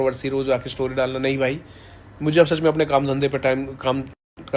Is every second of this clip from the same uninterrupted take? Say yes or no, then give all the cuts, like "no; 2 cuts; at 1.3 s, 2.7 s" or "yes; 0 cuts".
yes; 0 cuts